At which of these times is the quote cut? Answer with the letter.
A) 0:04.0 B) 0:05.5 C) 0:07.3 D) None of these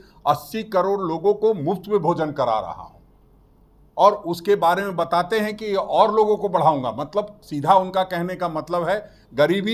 D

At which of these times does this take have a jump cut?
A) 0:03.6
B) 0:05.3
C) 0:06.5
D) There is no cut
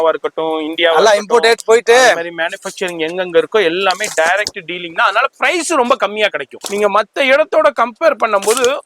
C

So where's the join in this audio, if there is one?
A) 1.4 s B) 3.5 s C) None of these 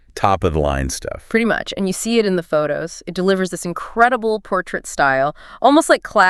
C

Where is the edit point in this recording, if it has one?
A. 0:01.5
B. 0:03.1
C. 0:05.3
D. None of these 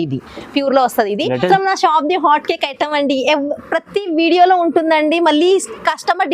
A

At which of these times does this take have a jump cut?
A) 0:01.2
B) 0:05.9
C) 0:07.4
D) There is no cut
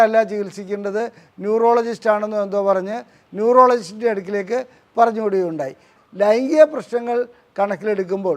B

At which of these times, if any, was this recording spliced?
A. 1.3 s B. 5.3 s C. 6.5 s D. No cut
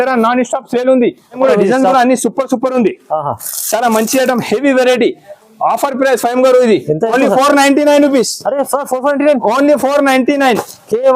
A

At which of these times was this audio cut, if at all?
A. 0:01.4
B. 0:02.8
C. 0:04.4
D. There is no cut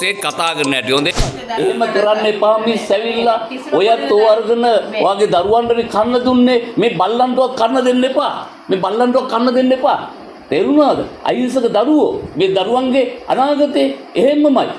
A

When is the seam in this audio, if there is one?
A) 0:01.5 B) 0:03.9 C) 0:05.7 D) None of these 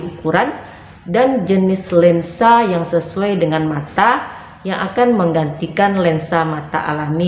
D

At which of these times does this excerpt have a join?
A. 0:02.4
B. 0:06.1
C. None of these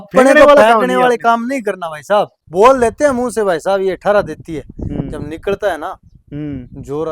A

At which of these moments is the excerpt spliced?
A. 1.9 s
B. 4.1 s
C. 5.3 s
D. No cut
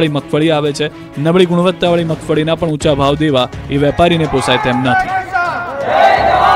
C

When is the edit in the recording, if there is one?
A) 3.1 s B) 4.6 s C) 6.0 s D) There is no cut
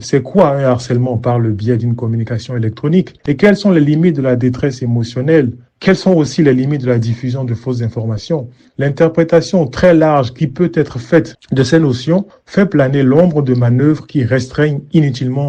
A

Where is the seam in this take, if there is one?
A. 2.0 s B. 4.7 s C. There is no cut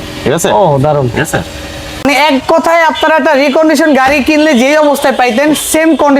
A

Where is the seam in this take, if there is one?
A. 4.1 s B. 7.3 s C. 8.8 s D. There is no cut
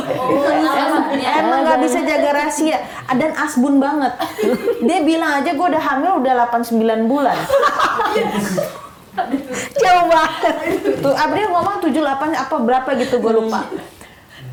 D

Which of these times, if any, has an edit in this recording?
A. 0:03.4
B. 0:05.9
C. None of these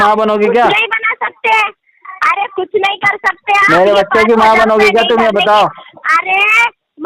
C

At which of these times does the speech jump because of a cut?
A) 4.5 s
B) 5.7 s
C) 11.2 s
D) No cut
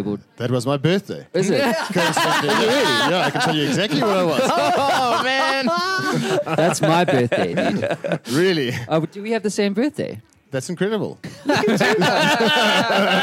C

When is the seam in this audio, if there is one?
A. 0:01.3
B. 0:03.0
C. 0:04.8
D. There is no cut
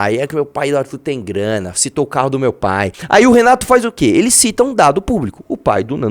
B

